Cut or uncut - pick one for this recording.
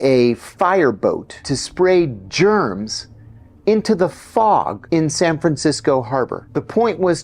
cut